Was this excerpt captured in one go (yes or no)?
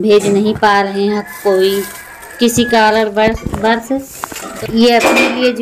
yes